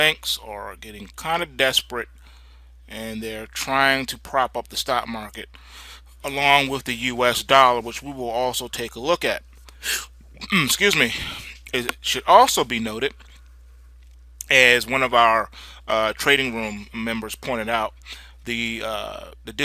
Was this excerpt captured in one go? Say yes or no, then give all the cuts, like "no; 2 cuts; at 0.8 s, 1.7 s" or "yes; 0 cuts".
no; 1 cut; at 6.3 s